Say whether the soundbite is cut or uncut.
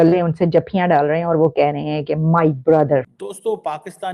cut